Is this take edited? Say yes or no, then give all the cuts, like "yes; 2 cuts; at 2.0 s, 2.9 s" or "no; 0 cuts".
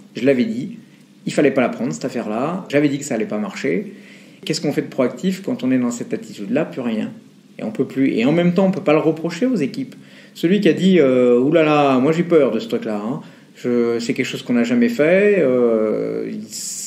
no; 0 cuts